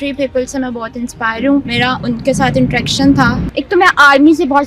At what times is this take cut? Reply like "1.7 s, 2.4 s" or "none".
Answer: 1.7 s, 3.4 s